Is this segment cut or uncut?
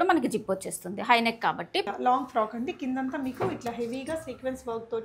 cut